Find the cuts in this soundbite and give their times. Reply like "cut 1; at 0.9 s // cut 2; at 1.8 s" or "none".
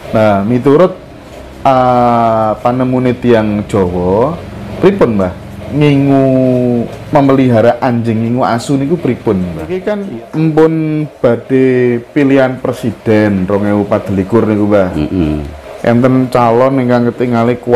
cut 1; at 9.9 s